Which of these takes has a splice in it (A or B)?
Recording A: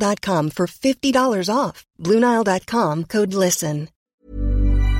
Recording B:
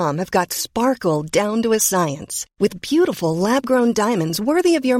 A